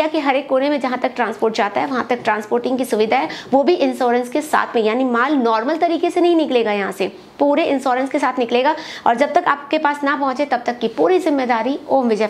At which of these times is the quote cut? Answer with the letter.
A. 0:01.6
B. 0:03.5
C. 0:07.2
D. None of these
D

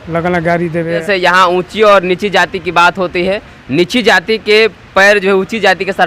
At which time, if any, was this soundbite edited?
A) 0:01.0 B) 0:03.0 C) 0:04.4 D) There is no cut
A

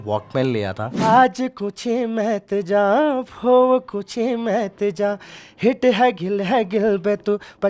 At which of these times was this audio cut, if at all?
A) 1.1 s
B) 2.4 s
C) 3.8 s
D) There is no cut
A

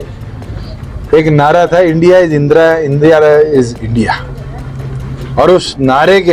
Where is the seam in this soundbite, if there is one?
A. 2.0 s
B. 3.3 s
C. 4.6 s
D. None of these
D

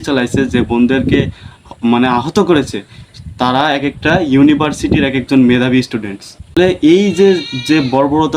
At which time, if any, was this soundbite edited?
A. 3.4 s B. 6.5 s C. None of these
B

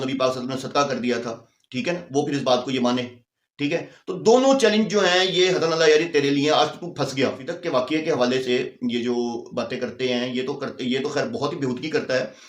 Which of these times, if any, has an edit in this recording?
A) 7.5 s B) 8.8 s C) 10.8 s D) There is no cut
A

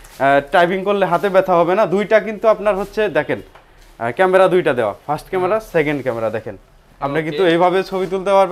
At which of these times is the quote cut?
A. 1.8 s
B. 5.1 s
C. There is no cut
C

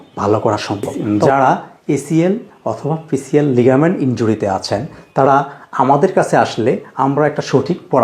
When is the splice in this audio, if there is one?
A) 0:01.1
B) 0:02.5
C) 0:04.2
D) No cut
A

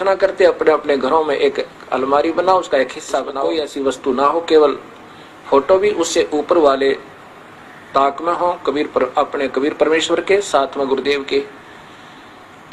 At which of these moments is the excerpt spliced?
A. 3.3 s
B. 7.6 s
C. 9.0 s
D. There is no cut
A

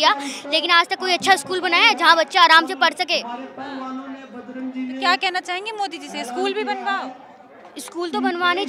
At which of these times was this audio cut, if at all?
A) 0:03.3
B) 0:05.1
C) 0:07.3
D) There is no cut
D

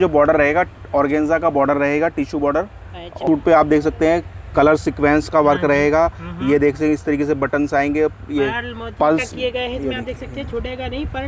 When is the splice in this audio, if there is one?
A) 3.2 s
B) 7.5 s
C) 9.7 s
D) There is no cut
A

